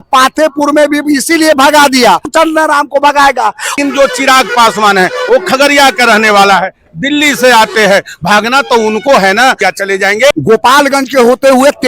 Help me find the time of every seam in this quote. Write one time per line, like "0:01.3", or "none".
0:02.3
0:03.7
0:10.0